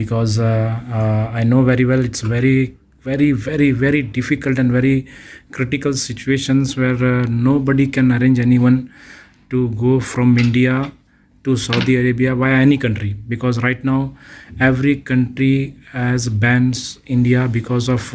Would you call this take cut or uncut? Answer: uncut